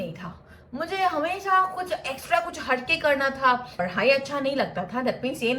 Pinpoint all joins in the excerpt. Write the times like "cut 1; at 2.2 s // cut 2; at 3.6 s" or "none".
cut 1; at 3.7 s